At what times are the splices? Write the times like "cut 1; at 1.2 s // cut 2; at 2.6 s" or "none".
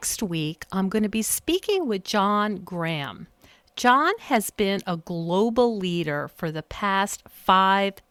none

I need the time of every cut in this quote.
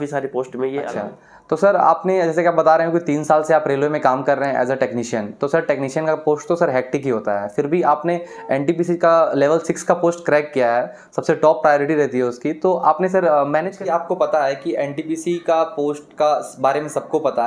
cut 1; at 0.9 s // cut 2; at 13.7 s

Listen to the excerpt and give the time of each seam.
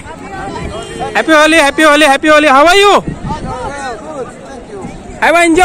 none

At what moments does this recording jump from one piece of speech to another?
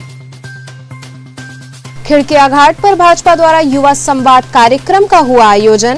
none

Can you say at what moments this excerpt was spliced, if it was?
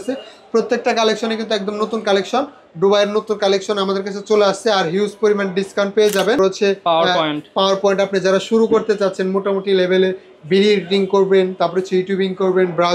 cut 1; at 6.4 s

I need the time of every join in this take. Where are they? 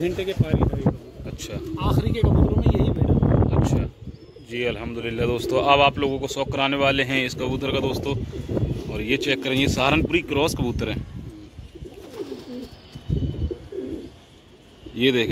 none

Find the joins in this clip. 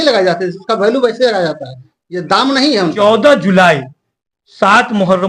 cut 1; at 2.9 s

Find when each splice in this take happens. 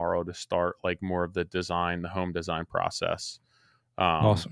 none

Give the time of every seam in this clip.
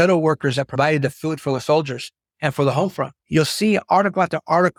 none

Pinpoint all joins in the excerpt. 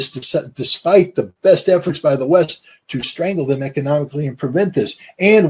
none

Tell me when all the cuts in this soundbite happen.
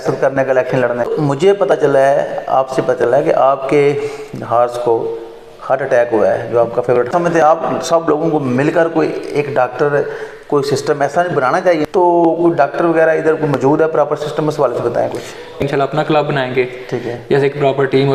cut 1; at 1.1 s // cut 2; at 7.1 s // cut 3; at 11.8 s // cut 4; at 15.6 s

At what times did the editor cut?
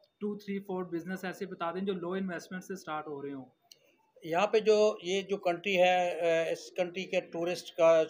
none

